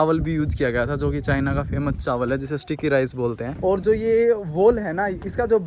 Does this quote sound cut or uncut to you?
cut